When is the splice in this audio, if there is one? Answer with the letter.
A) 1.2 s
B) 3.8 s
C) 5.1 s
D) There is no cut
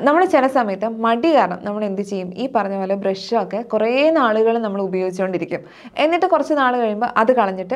D